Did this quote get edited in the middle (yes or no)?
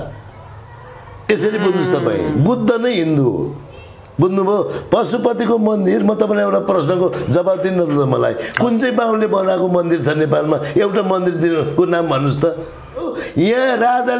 yes